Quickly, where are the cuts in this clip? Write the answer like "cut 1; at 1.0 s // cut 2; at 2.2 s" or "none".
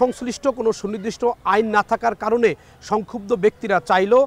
none